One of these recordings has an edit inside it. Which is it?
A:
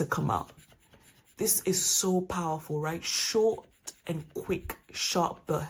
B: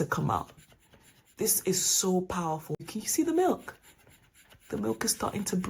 B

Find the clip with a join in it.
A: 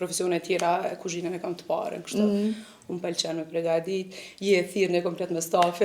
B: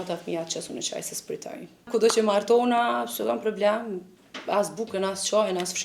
B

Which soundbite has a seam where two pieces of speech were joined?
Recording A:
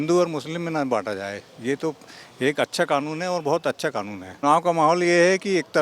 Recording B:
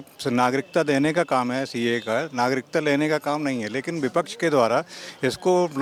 A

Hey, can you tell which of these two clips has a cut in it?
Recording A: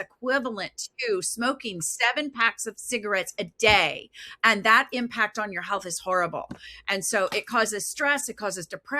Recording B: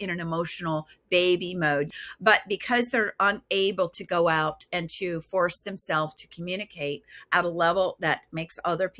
B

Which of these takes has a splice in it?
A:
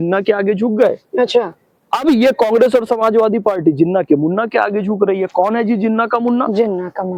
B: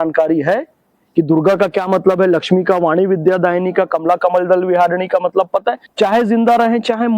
B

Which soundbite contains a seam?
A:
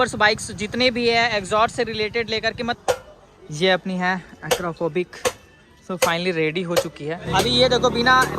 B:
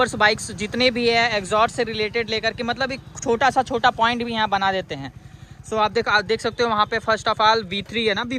A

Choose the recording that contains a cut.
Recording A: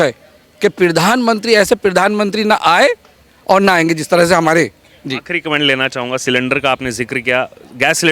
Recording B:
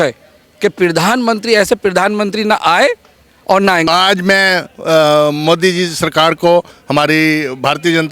B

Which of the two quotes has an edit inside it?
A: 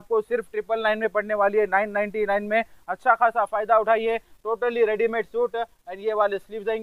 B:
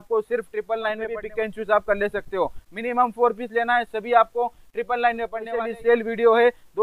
B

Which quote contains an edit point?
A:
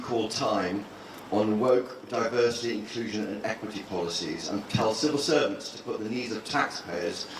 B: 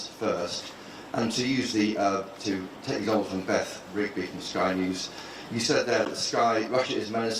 A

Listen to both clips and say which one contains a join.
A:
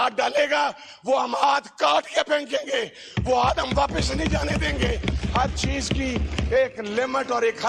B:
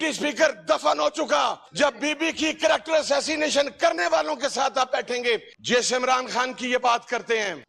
B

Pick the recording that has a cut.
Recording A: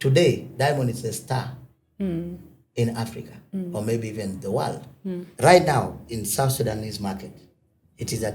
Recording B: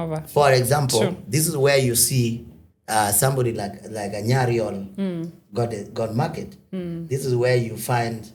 A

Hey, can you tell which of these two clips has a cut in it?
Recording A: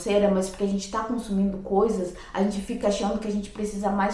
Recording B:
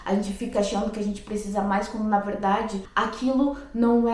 B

